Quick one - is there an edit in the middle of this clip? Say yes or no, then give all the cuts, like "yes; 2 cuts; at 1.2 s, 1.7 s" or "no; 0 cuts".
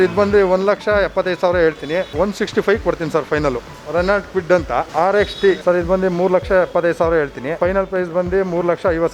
yes; 4 cuts; at 3.7 s, 4.9 s, 5.6 s, 7.5 s